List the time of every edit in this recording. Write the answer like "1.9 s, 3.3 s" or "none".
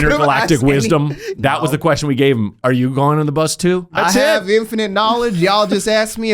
1.3 s, 3.9 s